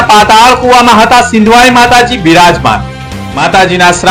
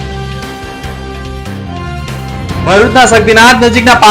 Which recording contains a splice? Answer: second; 2 cuts; at 1.8 s, 2.6 s

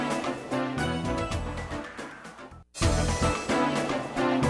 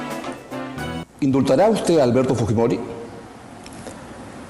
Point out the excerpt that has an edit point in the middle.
second; 1 cut; at 1.0 s

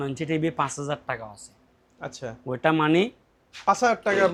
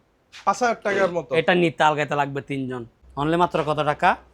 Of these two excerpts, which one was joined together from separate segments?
second; 1 cut; at 2.9 s

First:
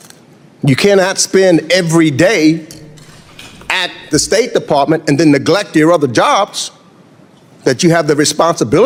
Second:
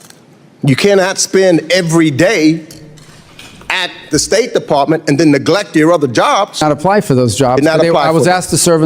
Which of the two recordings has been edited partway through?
second; 1 cut; at 6.6 s

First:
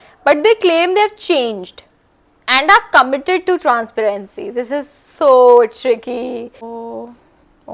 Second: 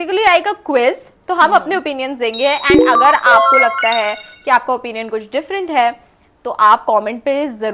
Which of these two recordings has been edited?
first; 1 cut; at 6.7 s

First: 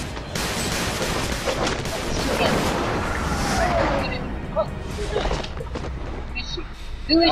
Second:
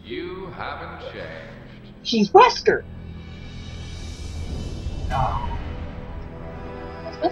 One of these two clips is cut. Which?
first; 1 cut; at 3.7 s

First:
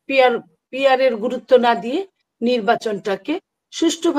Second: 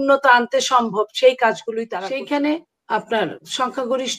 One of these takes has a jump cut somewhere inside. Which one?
second; 1 cut; at 1.9 s

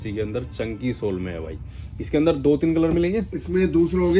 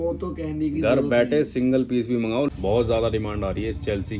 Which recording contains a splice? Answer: second; 1 cut; at 2.5 s

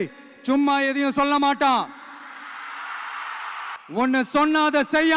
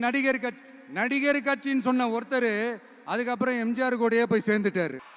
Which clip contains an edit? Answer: first; 1 cut; at 3.8 s

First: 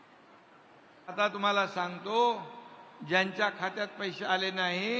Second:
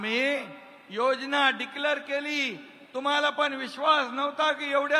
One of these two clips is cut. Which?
first; 1 cut; at 1.1 s

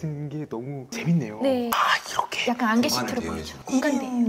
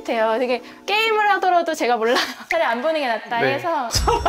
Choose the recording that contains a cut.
first; 1 cut; at 1.7 s

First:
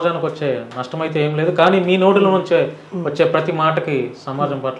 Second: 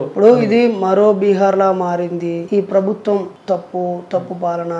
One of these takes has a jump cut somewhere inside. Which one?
second; 2 cuts; at 2.4 s, 3.3 s

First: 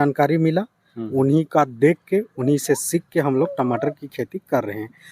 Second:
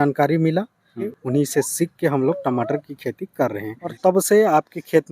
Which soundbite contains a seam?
second; 2 cuts; at 1.0 s, 3.8 s

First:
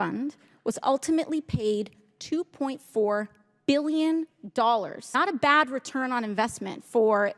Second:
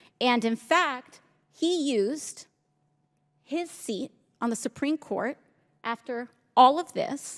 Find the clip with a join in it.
first; 1 cut; at 5.1 s

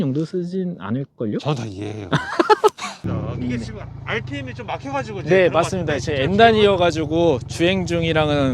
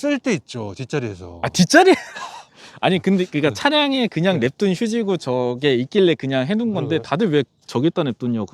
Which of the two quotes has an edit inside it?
first; 1 cut; at 3.0 s

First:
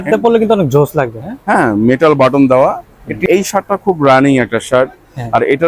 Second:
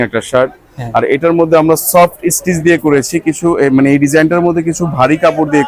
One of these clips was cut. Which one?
first; 1 cut; at 3.2 s

